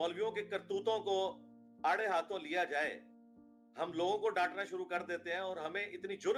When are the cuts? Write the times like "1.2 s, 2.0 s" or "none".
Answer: none